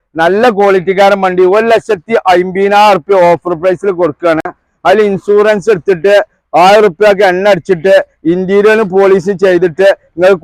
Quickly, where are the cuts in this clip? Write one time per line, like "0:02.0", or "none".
none